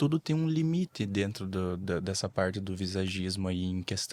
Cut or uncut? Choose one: uncut